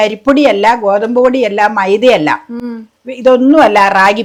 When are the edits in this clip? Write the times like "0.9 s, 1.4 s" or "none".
none